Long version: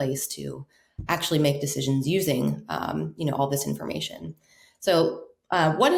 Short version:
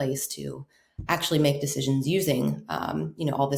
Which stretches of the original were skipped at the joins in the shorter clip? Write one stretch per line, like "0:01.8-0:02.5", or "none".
none